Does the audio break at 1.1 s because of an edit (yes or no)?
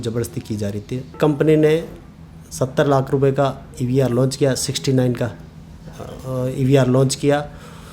yes